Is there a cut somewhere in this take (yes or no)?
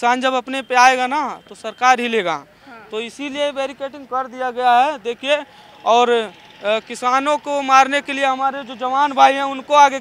no